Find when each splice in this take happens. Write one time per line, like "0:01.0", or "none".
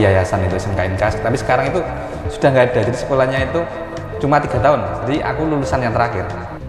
none